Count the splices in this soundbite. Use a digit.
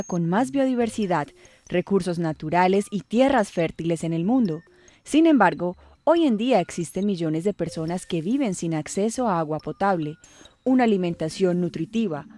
0